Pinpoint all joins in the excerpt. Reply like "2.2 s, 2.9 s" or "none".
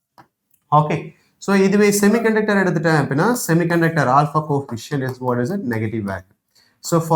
none